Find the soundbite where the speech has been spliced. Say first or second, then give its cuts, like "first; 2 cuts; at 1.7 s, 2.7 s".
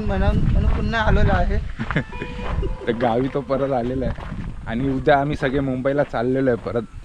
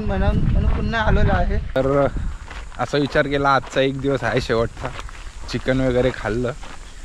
second; 1 cut; at 1.8 s